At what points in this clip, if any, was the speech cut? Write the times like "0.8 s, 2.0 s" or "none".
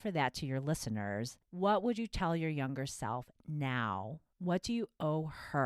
1.4 s, 4.2 s